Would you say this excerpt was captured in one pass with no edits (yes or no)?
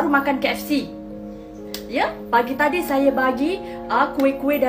yes